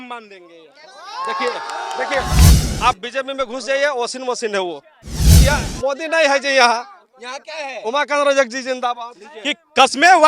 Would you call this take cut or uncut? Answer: cut